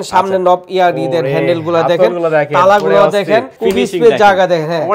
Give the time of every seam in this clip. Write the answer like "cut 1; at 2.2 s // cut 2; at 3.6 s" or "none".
cut 1; at 3.5 s